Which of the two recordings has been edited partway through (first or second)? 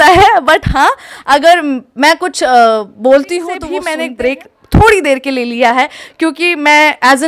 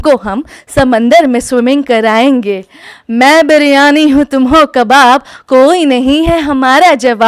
first